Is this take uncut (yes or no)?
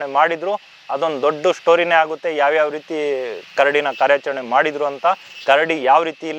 yes